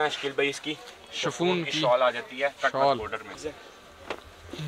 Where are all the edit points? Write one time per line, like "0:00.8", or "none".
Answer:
0:03.2